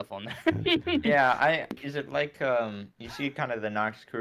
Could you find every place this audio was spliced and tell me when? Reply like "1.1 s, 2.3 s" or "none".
1.8 s